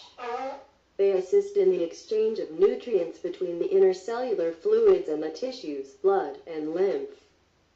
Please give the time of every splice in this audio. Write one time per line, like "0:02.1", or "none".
0:04.0